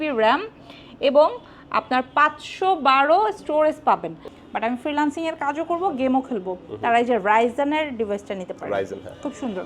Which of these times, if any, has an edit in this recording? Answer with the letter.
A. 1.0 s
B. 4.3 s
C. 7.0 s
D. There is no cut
B